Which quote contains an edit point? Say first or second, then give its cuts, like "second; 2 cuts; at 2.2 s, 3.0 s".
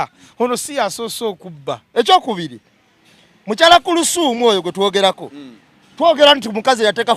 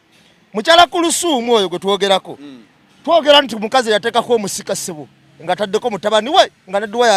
first; 1 cut; at 1.8 s